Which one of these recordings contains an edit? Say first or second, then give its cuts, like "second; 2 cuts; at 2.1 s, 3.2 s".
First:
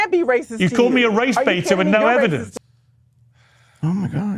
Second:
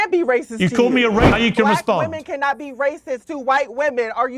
second; 1 cut; at 1.3 s